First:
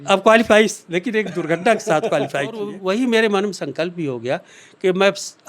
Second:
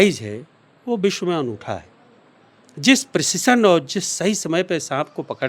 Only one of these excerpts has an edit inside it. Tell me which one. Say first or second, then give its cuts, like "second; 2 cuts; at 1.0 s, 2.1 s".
first; 1 cut; at 2.8 s